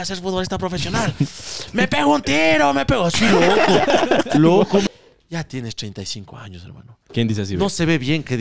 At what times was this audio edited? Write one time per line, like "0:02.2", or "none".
0:04.8